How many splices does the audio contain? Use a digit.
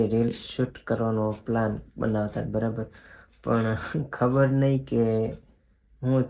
0